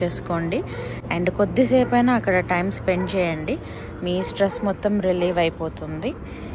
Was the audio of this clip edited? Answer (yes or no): no